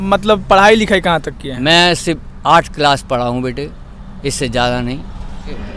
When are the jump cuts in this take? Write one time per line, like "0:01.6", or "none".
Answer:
none